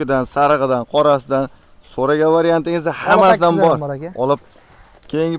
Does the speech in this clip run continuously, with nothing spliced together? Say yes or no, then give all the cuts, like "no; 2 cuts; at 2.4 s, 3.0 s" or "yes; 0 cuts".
no; 1 cut; at 4.4 s